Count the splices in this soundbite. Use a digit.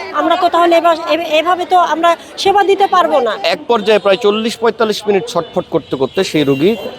1